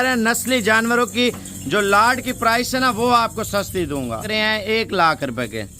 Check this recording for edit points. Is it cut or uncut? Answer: cut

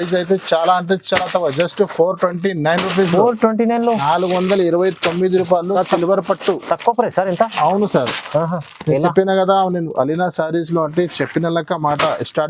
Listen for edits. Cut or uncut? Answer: uncut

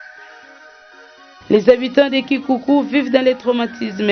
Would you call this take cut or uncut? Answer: uncut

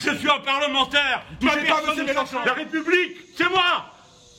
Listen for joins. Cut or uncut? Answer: cut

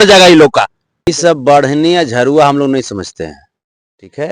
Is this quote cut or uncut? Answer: cut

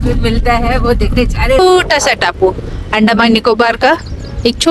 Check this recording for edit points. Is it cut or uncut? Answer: cut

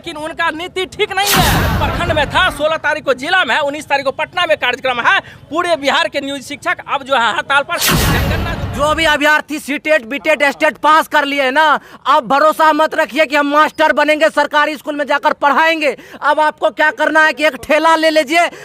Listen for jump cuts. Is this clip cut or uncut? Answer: cut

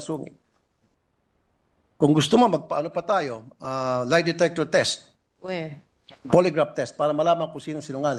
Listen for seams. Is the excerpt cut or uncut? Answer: uncut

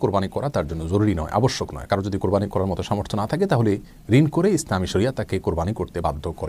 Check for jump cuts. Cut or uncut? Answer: uncut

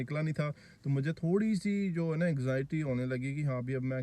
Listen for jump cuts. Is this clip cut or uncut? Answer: uncut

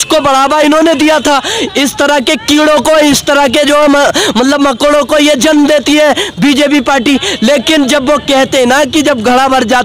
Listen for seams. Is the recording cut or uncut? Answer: uncut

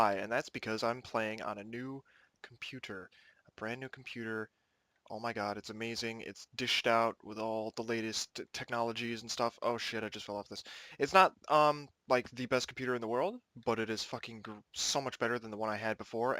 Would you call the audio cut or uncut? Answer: cut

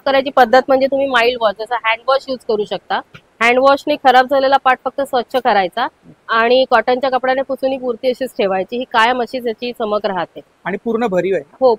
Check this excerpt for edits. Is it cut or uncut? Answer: uncut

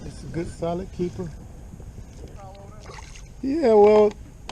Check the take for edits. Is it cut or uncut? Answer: cut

